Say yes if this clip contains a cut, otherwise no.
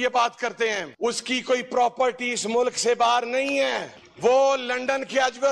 no